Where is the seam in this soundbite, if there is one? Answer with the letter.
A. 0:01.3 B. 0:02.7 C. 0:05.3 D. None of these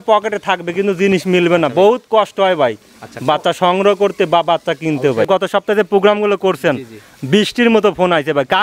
C